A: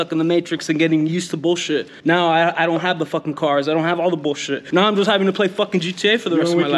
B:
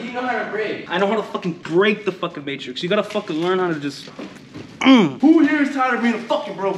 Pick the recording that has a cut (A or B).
B